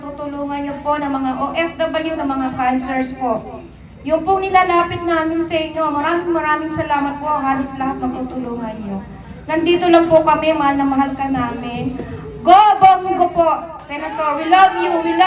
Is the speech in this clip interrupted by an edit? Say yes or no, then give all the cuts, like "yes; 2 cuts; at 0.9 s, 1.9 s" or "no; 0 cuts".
no; 0 cuts